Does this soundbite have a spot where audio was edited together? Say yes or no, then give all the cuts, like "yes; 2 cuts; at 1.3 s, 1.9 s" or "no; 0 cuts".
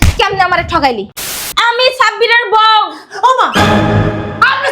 yes; 1 cut; at 1.3 s